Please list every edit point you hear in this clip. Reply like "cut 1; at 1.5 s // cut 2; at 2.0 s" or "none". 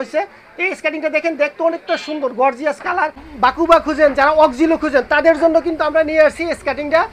cut 1; at 3.3 s